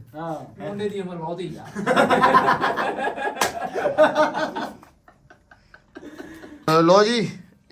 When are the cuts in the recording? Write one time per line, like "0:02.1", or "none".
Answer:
none